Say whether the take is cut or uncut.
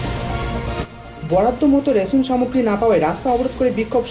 cut